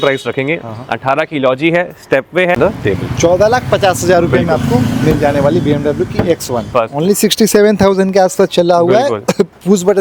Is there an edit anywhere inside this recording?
yes; 2 cuts; at 2.5 s, 6.7 s

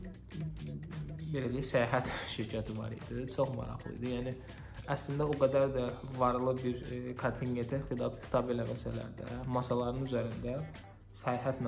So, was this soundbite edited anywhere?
no; 0 cuts

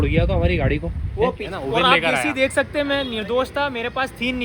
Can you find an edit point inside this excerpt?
yes; 1 cut; at 1.4 s

